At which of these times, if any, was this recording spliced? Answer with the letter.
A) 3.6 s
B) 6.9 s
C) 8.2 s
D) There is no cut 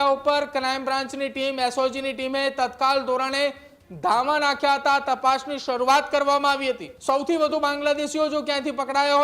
B